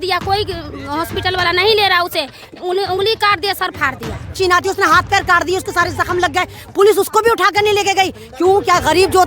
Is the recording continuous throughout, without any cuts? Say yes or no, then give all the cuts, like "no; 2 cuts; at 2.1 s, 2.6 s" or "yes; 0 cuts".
no; 1 cut; at 4.4 s